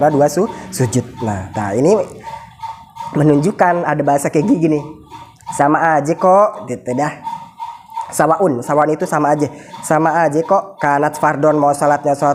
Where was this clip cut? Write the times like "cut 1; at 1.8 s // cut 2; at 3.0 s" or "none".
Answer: none